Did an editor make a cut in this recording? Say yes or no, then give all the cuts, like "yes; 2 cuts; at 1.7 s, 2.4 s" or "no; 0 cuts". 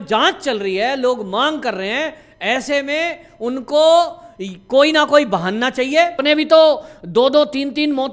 yes; 1 cut; at 6.2 s